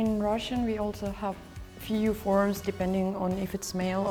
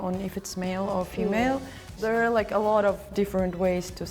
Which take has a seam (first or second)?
second